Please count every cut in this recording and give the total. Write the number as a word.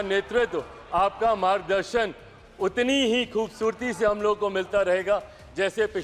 zero